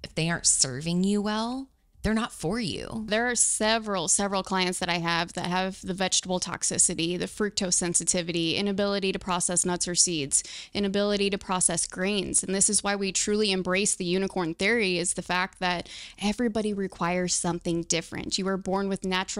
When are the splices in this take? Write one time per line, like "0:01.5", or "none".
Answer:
0:03.1